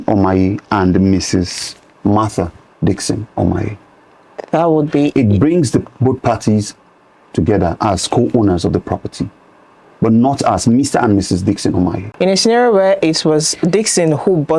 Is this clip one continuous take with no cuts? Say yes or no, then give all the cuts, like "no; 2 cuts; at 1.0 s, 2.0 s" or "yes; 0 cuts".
no; 1 cut; at 12.1 s